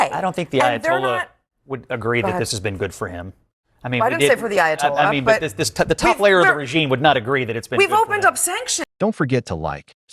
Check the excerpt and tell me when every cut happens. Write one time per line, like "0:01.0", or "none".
0:08.8